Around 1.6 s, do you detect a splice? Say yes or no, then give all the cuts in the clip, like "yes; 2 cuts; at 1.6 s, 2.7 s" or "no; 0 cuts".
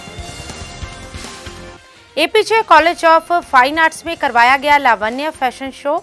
yes; 1 cut; at 1.6 s